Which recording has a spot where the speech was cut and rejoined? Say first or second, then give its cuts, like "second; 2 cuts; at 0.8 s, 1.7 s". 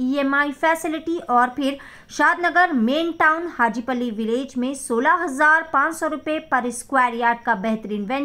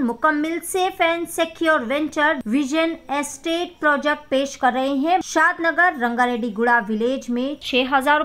second; 2 cuts; at 2.4 s, 5.2 s